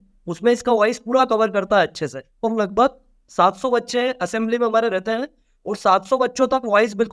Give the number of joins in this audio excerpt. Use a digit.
1